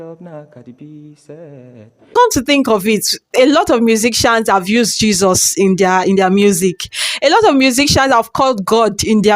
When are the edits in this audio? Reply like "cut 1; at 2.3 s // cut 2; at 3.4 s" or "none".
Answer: cut 1; at 2.1 s